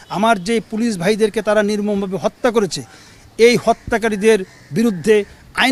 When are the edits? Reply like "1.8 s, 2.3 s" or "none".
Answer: none